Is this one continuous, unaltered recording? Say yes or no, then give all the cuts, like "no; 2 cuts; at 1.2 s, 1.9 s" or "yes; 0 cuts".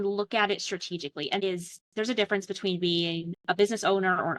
no; 1 cut; at 1.4 s